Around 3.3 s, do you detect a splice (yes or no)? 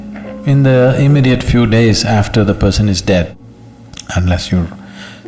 yes